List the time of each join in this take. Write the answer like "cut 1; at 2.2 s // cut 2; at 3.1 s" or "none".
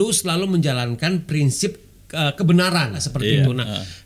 cut 1; at 3.1 s